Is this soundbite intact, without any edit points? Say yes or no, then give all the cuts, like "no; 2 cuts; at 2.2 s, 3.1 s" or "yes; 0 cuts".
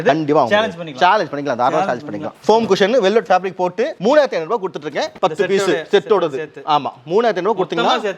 yes; 0 cuts